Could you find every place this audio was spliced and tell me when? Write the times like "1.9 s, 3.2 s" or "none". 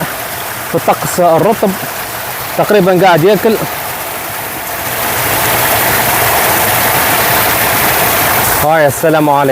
8.4 s